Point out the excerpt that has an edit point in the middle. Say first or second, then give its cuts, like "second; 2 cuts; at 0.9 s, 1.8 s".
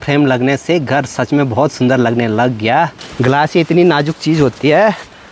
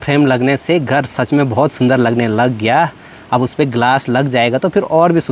first; 1 cut; at 3.0 s